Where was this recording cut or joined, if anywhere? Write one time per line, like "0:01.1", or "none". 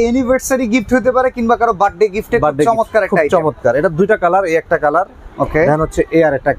none